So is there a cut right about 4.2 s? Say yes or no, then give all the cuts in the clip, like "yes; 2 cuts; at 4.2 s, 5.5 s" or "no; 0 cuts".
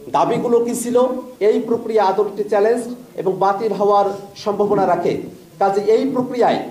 no; 1 cut; at 1.3 s